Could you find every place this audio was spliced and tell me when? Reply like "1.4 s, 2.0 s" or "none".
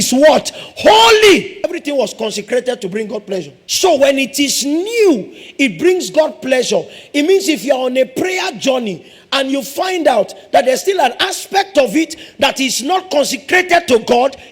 1.6 s, 3.6 s